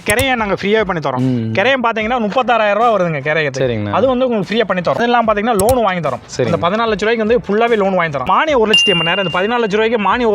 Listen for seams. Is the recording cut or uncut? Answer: cut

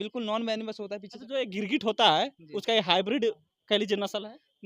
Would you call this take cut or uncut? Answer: cut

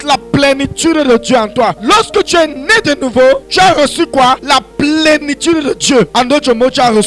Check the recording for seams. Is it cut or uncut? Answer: cut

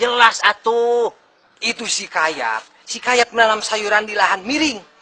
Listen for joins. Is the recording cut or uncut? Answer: uncut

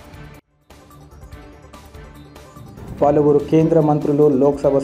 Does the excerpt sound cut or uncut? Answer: cut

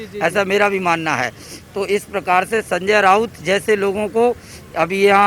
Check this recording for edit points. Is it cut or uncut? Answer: uncut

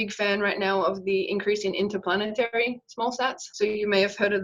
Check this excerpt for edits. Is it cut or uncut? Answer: cut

